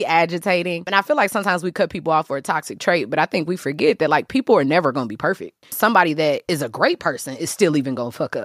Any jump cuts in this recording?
yes; 3 cuts; at 0.9 s, 5.7 s, 6.4 s

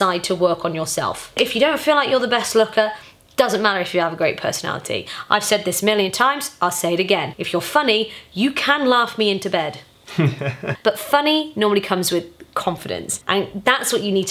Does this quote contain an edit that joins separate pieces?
yes; 4 cuts; at 1.3 s, 7.3 s, 10.7 s, 13.1 s

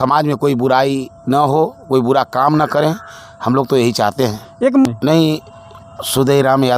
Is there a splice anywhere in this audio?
yes; 1 cut; at 4.8 s

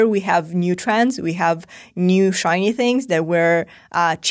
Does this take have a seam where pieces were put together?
no; 0 cuts

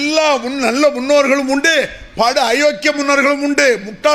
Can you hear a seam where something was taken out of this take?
no; 0 cuts

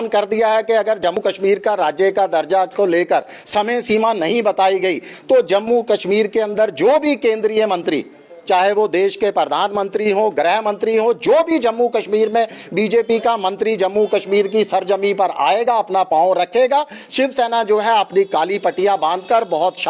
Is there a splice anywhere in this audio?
yes; 1 cut; at 1.1 s

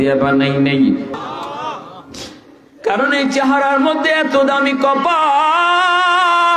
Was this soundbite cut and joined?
yes; 1 cut; at 1.1 s

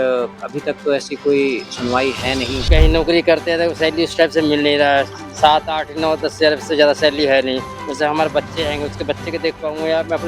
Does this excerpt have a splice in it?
yes; 1 cut; at 2.7 s

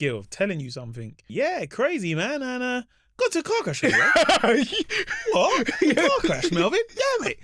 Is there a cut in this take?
yes; 1 cut; at 1.3 s

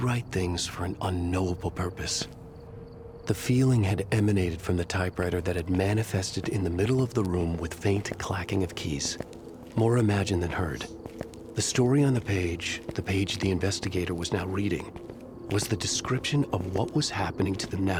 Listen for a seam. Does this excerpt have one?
no; 0 cuts

